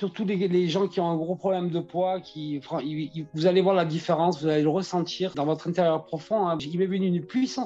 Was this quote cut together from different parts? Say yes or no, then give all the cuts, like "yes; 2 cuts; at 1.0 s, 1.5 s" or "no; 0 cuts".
yes; 2 cuts; at 5.3 s, 6.6 s